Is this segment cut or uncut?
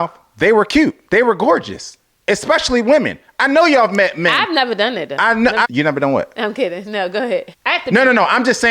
cut